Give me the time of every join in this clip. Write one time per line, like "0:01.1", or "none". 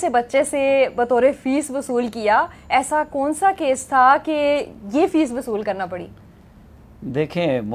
none